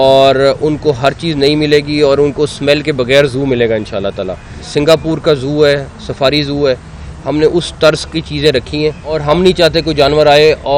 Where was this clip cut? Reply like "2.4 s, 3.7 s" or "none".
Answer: 4.6 s, 9.1 s